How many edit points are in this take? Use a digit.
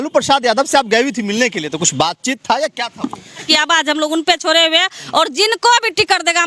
1